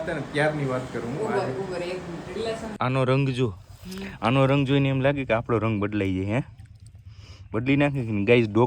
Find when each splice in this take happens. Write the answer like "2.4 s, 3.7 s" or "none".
2.7 s